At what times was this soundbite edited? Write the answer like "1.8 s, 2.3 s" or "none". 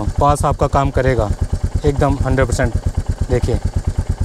none